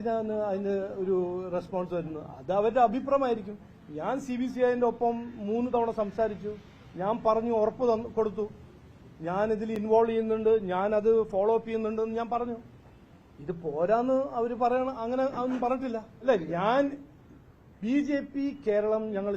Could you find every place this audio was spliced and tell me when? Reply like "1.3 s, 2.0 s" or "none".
16.2 s